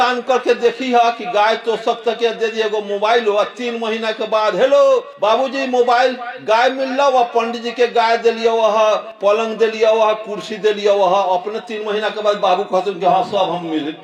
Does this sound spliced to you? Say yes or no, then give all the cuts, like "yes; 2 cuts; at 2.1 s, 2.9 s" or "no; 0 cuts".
no; 0 cuts